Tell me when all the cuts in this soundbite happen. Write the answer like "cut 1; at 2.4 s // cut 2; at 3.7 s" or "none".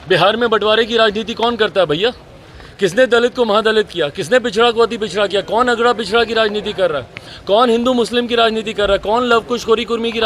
none